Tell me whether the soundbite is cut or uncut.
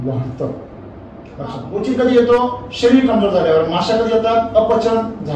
cut